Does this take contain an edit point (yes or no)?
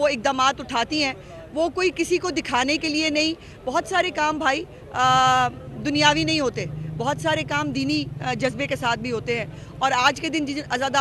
no